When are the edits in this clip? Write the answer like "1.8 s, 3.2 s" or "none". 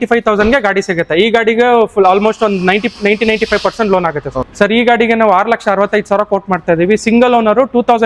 4.4 s